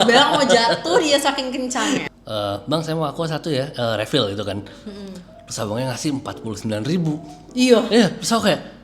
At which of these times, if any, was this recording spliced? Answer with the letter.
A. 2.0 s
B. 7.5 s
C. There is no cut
A